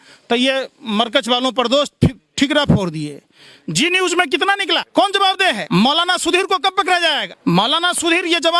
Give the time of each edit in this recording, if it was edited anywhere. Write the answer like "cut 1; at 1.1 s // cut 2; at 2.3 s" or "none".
cut 1; at 4.9 s // cut 2; at 5.6 s // cut 3; at 7.3 s